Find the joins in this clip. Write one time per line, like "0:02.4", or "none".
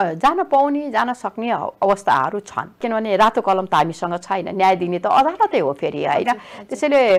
0:02.8